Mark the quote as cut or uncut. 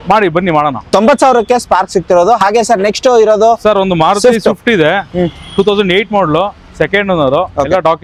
uncut